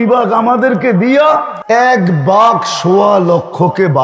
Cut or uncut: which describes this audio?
cut